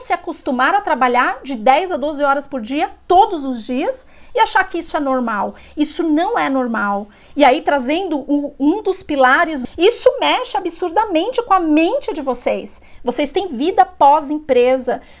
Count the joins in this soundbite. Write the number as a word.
zero